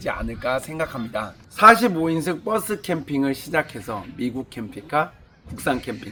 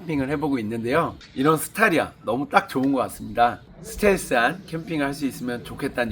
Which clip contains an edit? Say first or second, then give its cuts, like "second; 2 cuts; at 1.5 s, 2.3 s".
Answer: second; 2 cuts; at 1.2 s, 3.7 s